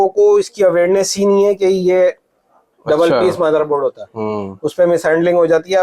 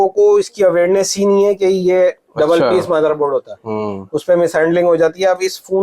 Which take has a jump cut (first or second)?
second